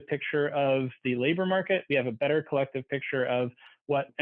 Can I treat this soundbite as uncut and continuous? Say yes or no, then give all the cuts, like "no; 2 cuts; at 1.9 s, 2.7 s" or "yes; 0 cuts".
yes; 0 cuts